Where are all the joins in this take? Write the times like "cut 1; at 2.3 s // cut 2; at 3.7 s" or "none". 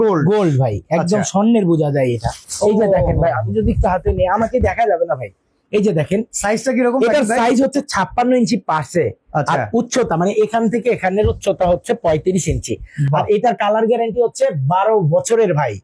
none